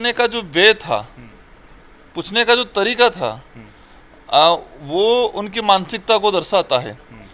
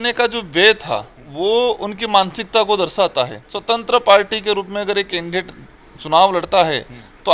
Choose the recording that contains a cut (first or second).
second